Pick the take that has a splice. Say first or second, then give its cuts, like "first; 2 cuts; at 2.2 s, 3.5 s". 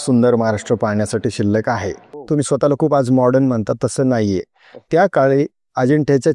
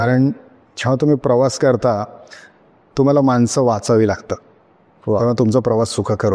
first; 1 cut; at 2.1 s